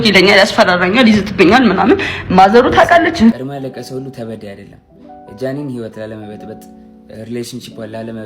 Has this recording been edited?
yes; 1 cut; at 3.4 s

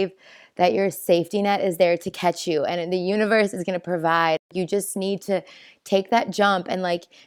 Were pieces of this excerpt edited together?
no; 0 cuts

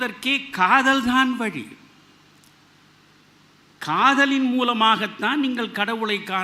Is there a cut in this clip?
no; 0 cuts

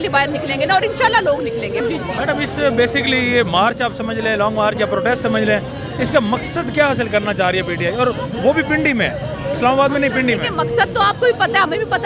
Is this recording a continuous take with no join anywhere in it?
yes; 0 cuts

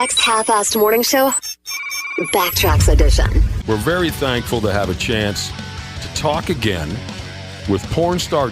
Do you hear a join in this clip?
yes; 1 cut; at 3.4 s

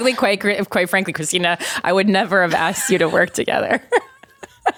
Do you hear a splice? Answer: no; 0 cuts

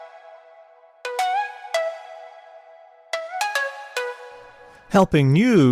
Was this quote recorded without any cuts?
yes; 0 cuts

